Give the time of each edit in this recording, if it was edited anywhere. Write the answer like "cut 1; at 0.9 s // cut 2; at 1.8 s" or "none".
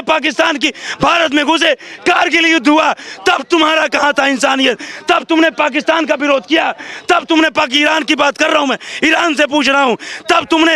none